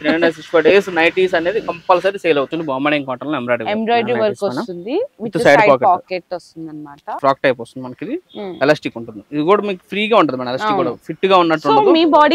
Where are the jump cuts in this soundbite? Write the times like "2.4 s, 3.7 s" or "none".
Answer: 2.5 s, 7.2 s